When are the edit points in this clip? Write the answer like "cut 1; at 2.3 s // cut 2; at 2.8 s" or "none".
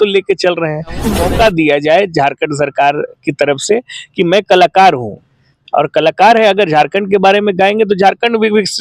cut 1; at 1.2 s